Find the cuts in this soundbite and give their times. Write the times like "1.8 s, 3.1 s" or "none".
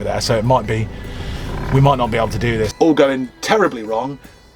2.7 s